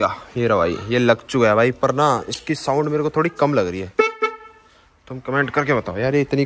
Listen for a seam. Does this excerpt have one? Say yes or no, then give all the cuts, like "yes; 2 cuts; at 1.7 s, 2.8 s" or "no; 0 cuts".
no; 0 cuts